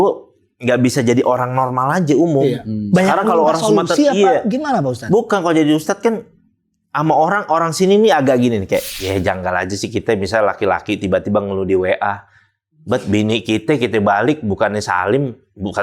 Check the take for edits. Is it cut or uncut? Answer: cut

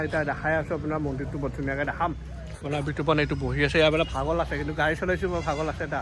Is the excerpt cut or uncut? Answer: uncut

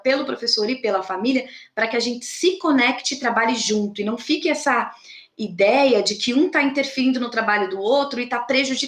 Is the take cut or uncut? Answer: uncut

